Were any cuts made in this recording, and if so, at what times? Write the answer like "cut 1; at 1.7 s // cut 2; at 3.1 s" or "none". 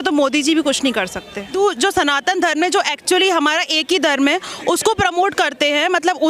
cut 1; at 1.6 s